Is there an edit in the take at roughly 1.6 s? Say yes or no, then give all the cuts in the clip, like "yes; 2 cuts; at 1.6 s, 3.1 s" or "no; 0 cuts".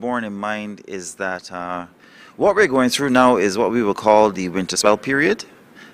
no; 1 cut; at 4.8 s